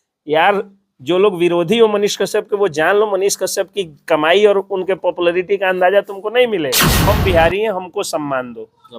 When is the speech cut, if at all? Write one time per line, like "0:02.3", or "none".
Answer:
0:07.0

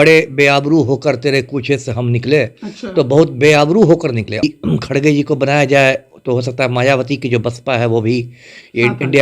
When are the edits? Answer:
0:04.4

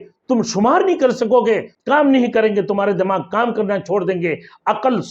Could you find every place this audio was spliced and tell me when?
0:01.7

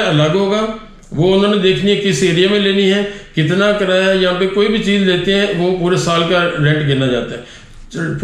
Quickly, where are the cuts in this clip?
none

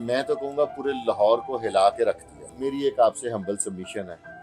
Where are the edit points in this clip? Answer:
0:02.5

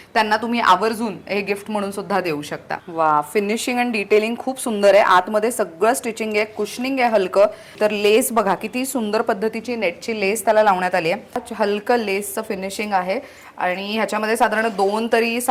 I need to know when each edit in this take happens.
0:02.8
0:07.7
0:11.5

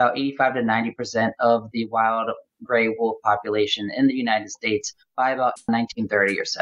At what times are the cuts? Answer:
0:05.7

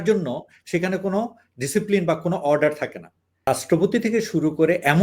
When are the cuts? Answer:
0:03.5

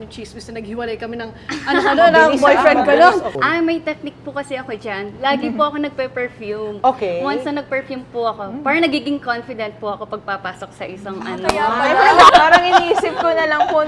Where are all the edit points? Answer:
0:03.4
0:12.3

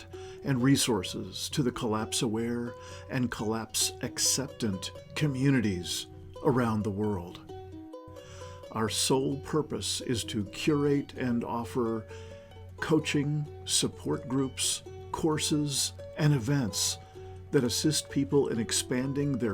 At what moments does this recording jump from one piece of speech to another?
0:07.3
0:08.7

